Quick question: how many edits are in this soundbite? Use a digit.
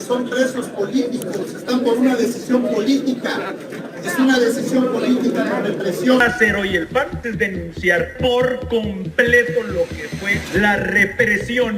1